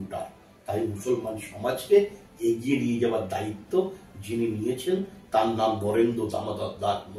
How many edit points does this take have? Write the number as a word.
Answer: zero